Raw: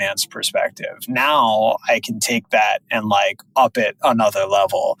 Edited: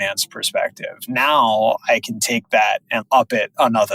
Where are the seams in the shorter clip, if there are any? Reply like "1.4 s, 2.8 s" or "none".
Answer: 3.0 s